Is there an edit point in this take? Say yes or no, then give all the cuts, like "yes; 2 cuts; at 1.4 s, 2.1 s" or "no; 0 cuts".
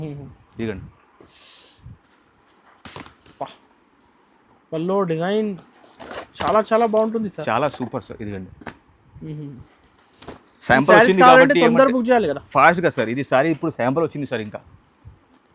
no; 0 cuts